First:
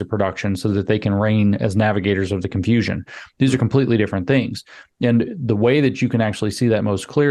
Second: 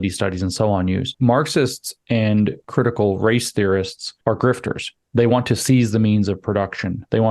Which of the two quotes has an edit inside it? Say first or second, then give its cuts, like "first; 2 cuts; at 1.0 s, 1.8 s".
second; 3 cuts; at 1.1 s, 2.6 s, 4.0 s